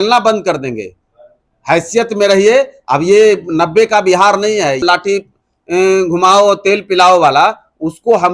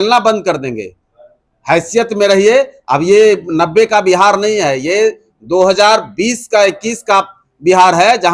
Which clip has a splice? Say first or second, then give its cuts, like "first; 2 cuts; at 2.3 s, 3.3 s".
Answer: first; 1 cut; at 4.8 s